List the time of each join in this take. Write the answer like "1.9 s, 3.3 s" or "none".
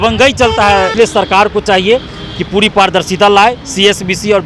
0.9 s

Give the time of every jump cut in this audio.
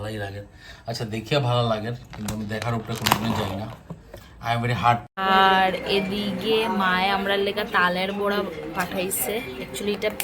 5.1 s

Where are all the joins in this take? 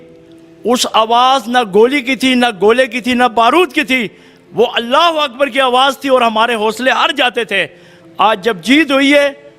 none

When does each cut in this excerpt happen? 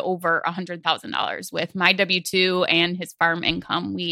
none

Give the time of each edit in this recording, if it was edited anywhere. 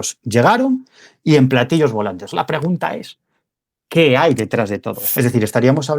5.0 s

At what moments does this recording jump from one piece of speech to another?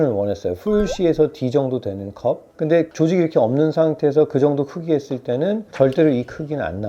none

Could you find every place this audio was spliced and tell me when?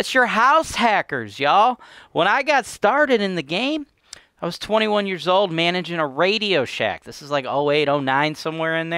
none

